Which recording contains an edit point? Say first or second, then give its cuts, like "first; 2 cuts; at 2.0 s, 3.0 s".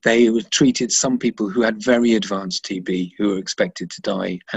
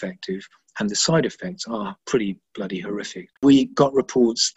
second; 2 cuts; at 2.0 s, 3.4 s